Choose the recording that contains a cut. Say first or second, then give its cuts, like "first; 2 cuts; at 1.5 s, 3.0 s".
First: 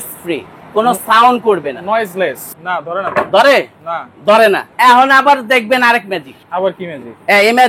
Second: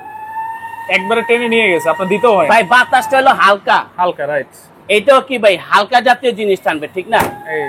first; 3 cuts; at 2.5 s, 4.7 s, 6.4 s